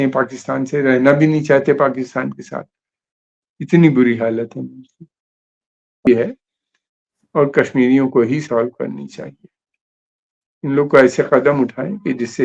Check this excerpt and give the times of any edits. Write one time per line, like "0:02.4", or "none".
0:06.1